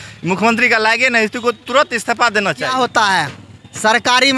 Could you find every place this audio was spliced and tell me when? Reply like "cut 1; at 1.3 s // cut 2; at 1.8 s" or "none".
cut 1; at 2.6 s